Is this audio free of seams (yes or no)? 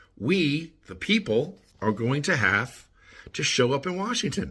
no